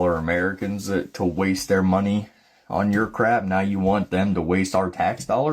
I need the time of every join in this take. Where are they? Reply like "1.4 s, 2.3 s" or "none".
none